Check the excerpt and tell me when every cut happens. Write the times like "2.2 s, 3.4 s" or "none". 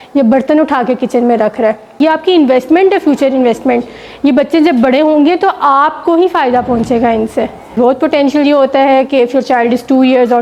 2.0 s, 7.7 s